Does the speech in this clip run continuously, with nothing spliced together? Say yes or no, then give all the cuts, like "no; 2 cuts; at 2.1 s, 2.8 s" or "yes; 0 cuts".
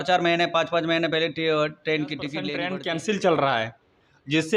no; 1 cut; at 2.5 s